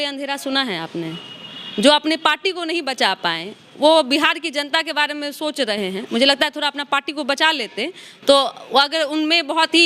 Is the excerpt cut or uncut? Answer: uncut